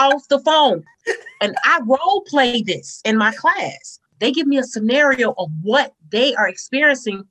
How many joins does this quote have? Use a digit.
1